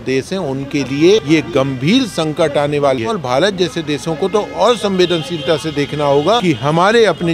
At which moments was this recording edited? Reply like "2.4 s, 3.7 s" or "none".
1.2 s, 3.1 s, 6.4 s